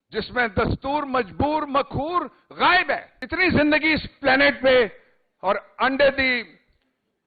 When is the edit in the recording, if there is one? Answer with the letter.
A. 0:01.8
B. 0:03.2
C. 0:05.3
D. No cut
B